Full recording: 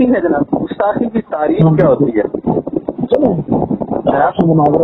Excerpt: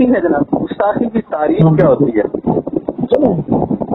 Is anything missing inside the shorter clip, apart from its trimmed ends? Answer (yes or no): no